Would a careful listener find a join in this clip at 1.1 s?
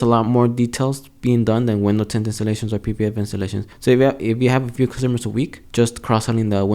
no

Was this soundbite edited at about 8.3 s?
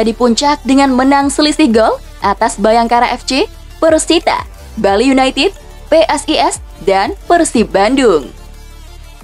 yes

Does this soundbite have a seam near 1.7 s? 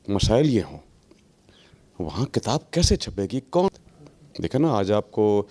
no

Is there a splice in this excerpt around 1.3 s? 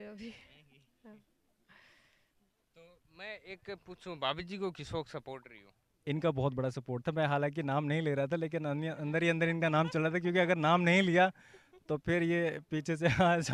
no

